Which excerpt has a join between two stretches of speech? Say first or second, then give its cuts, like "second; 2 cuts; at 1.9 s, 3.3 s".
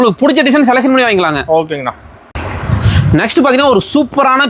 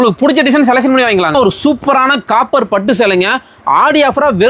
second; 1 cut; at 1.3 s